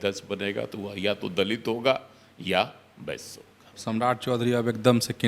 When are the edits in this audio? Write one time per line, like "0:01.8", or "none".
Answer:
0:03.7